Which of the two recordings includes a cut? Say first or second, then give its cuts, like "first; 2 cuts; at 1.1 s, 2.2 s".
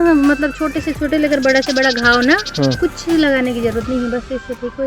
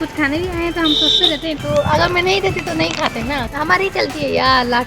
second; 2 cuts; at 1.6 s, 3.5 s